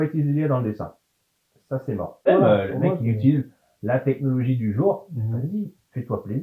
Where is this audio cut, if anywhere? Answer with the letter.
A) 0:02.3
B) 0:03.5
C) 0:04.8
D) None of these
A